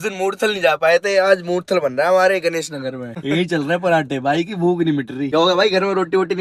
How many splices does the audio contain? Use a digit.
0